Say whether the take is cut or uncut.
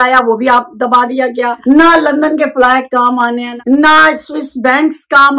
cut